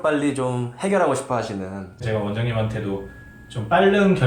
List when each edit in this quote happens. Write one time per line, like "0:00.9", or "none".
0:02.0